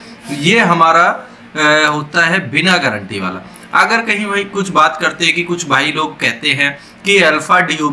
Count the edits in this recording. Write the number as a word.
zero